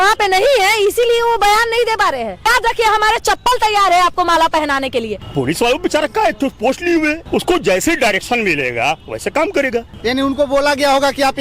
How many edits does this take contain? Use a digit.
4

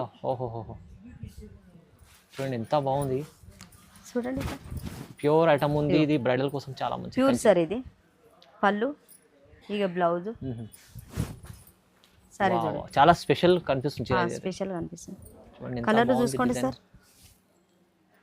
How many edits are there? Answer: 1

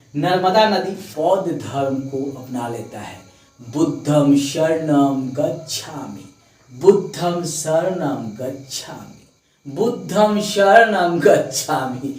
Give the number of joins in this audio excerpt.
1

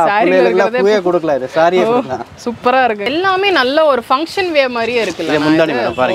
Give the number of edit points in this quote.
1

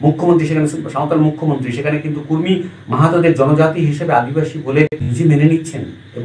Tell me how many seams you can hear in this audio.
1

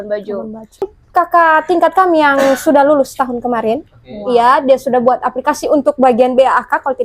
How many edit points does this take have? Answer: 1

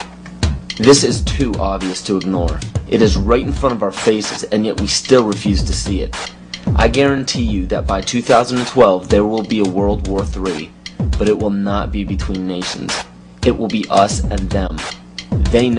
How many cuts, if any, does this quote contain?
1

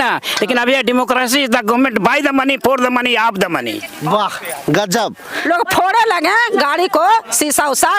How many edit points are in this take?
1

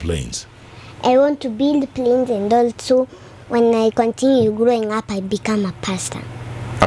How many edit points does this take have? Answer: 0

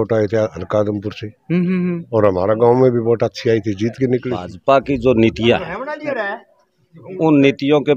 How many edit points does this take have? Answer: 1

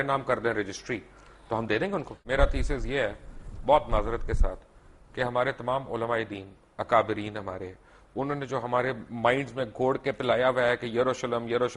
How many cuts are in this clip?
1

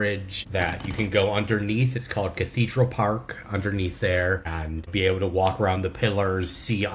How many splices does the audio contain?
0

